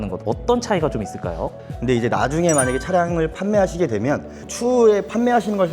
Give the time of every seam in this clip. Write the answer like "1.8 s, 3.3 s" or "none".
1.5 s, 4.5 s